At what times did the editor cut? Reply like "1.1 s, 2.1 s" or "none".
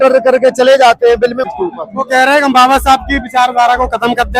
1.4 s